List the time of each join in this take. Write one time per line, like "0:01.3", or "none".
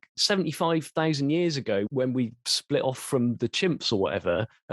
0:01.9